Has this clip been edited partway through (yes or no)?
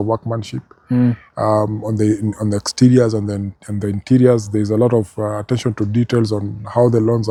no